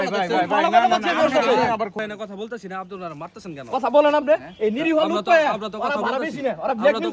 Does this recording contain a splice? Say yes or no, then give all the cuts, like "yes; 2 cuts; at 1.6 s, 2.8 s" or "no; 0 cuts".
yes; 1 cut; at 2.0 s